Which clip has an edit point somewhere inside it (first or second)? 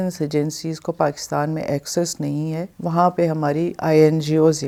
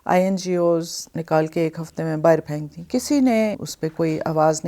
second